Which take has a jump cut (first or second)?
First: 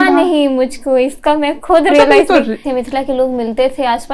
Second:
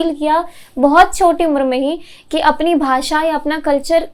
first